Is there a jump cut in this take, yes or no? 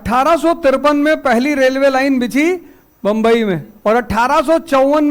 yes